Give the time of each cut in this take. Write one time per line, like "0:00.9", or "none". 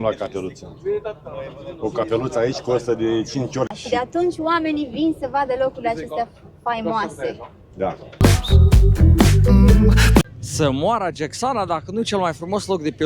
0:03.7
0:08.2
0:10.2